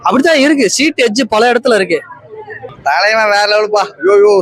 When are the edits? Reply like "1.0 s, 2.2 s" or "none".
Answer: 2.6 s